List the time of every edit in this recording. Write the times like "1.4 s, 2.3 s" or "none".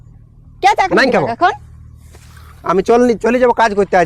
none